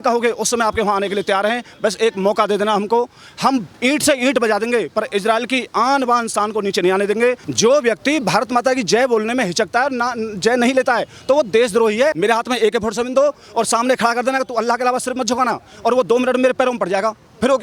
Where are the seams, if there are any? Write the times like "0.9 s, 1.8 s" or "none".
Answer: 7.5 s, 12.2 s